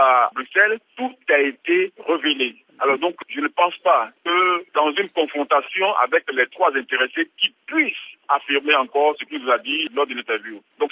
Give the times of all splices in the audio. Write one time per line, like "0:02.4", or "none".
none